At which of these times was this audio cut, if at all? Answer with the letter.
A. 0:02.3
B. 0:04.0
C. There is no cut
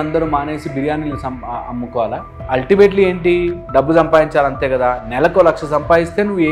A